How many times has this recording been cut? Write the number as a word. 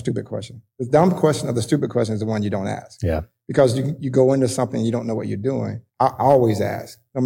zero